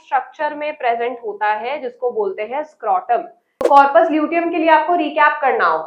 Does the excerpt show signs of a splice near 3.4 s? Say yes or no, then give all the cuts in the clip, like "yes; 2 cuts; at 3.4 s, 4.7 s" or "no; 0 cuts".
yes; 1 cut; at 3.4 s